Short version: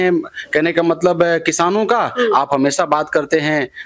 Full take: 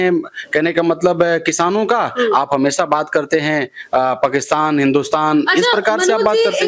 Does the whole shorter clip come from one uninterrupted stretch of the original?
yes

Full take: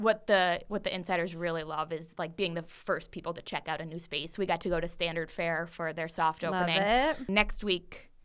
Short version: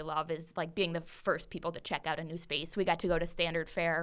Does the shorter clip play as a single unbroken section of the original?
yes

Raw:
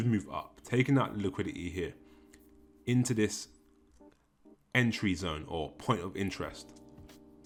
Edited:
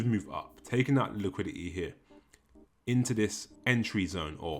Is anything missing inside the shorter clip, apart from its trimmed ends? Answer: yes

